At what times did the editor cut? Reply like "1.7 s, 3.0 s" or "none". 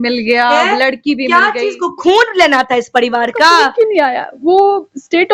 3.7 s